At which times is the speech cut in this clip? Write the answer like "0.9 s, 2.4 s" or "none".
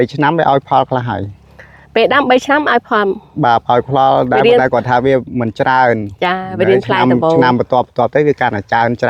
none